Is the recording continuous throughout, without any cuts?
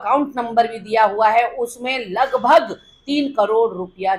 yes; 0 cuts

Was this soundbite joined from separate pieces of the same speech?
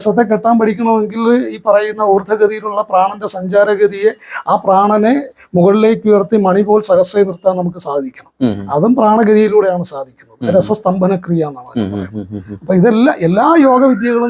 no; 0 cuts

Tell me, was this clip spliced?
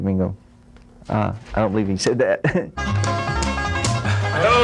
yes; 1 cut; at 2.8 s

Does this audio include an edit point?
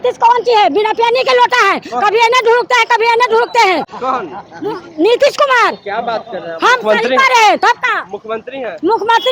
no; 0 cuts

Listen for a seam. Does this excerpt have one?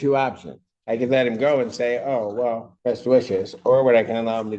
yes; 1 cut; at 2.7 s

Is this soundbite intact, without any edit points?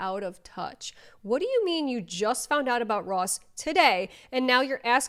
yes; 0 cuts

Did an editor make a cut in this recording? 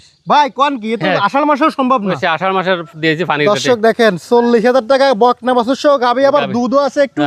no; 0 cuts

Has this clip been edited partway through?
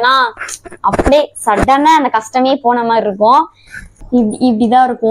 yes; 1 cut; at 4.0 s

